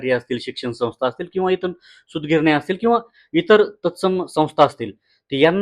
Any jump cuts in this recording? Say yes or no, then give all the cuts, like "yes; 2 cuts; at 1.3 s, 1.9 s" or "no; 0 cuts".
no; 0 cuts